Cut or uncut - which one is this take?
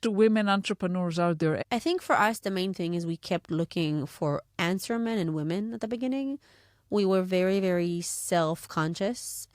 cut